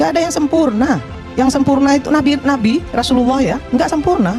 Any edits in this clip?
yes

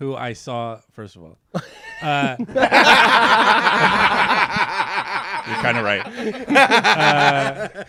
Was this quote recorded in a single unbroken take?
yes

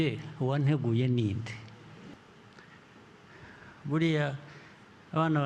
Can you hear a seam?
yes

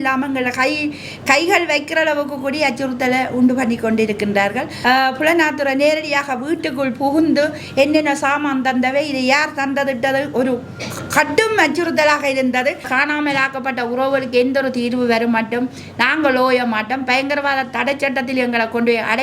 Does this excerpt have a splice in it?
yes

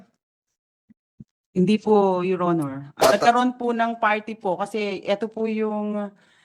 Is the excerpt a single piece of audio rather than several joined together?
no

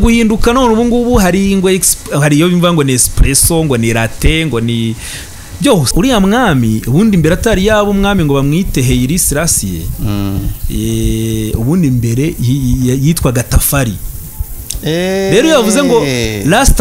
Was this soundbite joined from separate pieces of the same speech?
yes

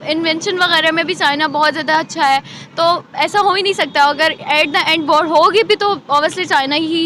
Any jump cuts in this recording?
no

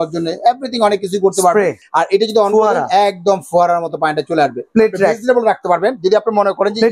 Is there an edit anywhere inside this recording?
yes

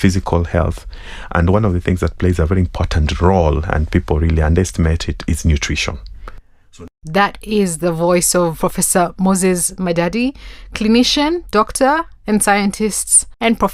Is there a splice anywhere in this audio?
yes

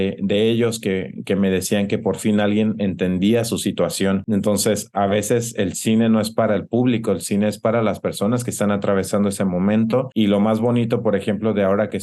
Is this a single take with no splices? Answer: yes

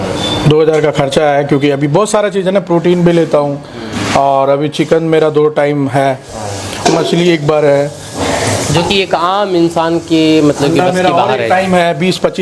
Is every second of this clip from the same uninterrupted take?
yes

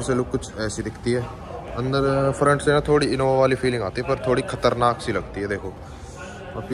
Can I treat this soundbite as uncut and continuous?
yes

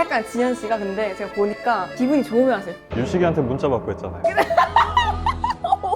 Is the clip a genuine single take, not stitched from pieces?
no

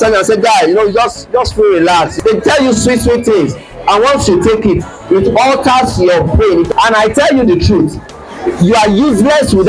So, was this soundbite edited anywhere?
yes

